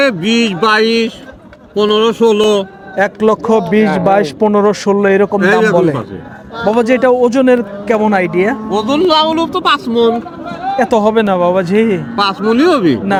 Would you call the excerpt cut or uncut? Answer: uncut